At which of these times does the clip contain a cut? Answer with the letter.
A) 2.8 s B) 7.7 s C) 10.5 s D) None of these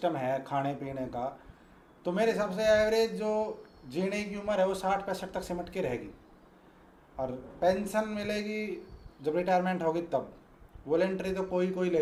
D